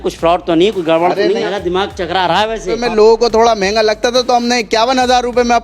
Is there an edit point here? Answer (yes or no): yes